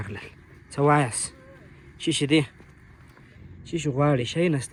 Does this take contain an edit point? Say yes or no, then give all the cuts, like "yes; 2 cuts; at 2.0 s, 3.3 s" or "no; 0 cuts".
no; 0 cuts